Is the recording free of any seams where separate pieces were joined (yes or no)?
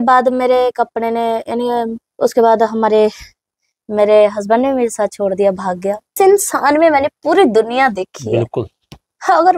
no